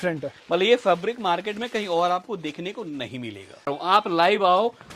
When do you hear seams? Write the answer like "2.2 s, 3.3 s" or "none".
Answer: 3.7 s